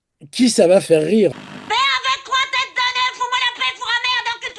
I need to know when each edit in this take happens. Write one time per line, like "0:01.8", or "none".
0:01.4